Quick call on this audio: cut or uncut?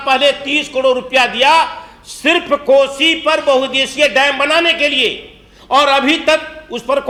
uncut